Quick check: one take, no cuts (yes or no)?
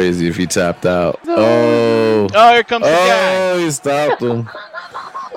no